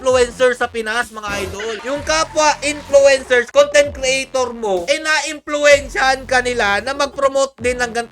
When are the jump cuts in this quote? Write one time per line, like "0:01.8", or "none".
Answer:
0:01.8
0:04.8